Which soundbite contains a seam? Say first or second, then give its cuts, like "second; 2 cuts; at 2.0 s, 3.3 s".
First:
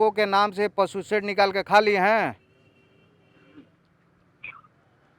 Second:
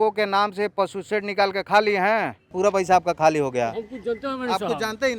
second; 1 cut; at 2.5 s